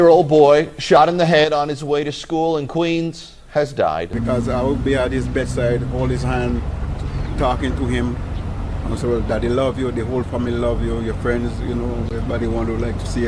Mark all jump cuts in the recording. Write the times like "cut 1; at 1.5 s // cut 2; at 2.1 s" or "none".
cut 1; at 4.1 s